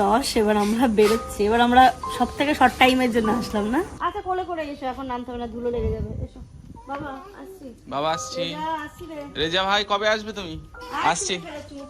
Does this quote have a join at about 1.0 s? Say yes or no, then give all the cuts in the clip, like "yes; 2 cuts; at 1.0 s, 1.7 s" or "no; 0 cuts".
no; 2 cuts; at 4.0 s, 10.8 s